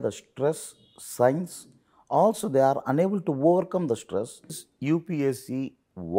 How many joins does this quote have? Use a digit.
1